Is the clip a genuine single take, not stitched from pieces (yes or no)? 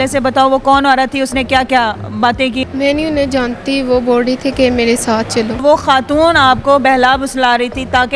no